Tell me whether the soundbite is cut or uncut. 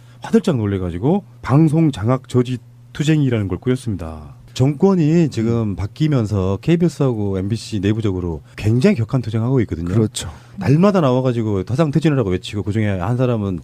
cut